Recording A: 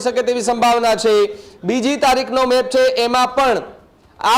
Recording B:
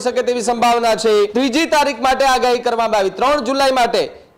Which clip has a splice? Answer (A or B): B